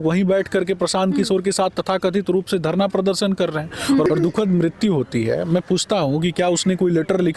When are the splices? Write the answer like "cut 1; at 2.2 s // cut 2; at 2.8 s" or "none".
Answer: cut 1; at 4.1 s